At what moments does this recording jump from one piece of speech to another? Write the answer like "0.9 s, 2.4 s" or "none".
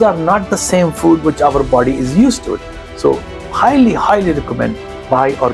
none

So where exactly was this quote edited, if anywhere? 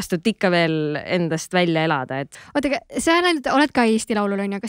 2.2 s

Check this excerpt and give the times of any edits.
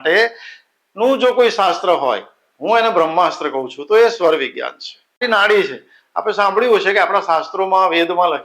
5.2 s

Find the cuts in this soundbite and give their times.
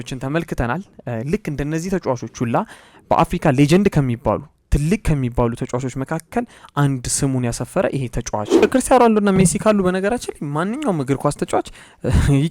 8.6 s

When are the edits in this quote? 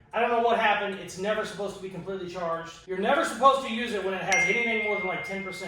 2.7 s

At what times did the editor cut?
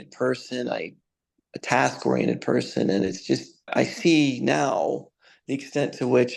3.7 s

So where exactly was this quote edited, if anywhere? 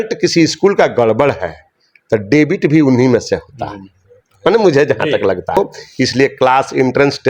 5.6 s

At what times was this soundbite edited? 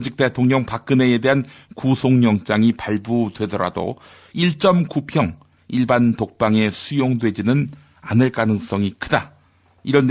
2.8 s

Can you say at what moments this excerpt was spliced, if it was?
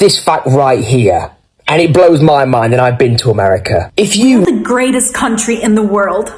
4.4 s

